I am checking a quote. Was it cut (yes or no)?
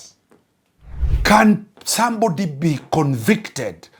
yes